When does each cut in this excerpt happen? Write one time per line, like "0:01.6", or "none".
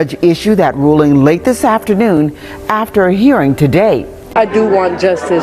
0:04.3

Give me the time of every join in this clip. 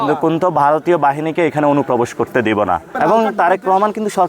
0:02.8

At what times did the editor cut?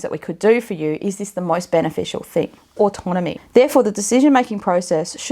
0:02.9

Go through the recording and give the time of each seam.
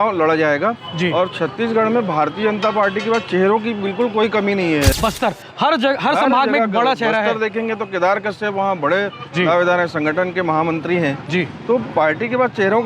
0:05.0

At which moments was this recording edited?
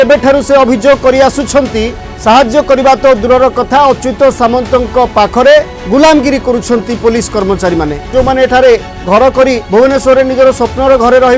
0:02.0
0:05.8
0:08.1
0:09.6

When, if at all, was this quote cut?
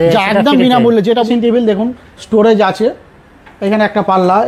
0:01.3

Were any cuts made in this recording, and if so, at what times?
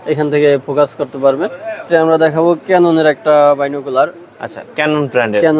0:01.8

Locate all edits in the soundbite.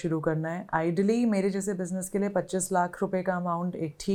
none

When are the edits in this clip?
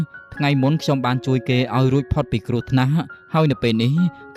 none

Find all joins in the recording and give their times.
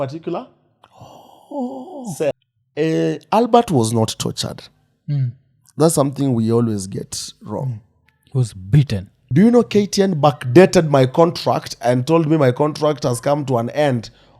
0:02.3
0:09.2

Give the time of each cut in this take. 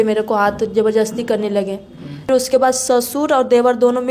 0:02.3

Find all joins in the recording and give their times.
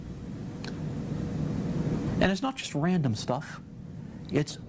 0:03.4

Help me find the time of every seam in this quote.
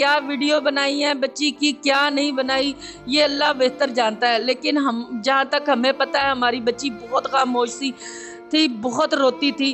none

